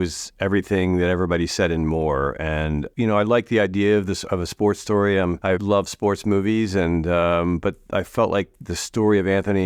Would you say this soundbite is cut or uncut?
cut